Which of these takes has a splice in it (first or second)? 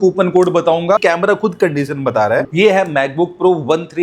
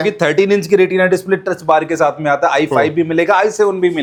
first